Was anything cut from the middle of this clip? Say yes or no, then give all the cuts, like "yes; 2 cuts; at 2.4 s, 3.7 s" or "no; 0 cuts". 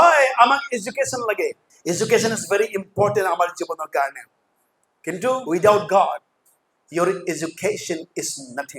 yes; 2 cuts; at 1.7 s, 5.4 s